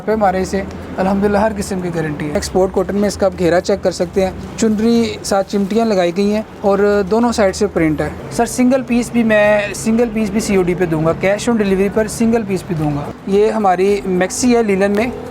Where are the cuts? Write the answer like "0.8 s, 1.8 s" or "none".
2.4 s, 4.4 s, 6.5 s, 8.2 s, 13.1 s